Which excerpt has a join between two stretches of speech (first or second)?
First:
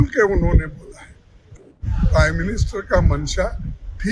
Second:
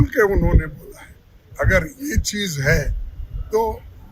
first